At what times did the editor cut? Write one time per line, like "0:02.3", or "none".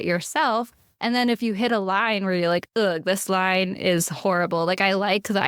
none